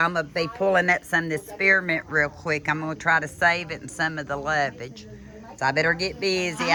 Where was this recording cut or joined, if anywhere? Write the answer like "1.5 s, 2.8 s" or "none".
none